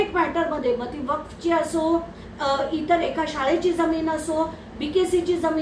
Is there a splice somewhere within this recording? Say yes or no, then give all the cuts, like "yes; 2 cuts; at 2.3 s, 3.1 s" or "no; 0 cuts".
no; 0 cuts